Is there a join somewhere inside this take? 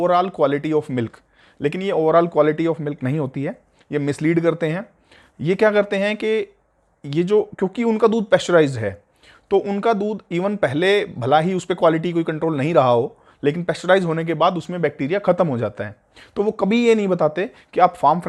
no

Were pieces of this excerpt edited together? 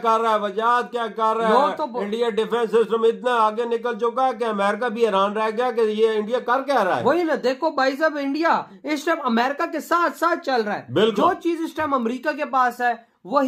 no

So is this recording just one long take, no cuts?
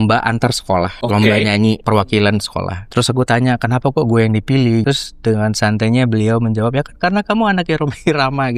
no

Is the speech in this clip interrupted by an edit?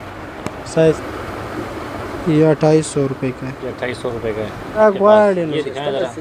yes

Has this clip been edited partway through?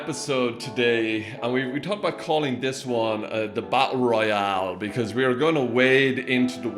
yes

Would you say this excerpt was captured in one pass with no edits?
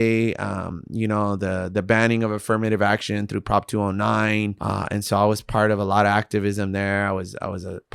no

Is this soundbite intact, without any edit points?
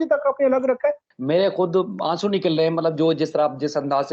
no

